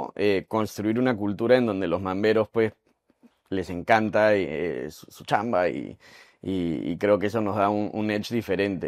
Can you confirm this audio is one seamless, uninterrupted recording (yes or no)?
yes